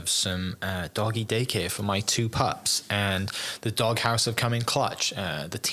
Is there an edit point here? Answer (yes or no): no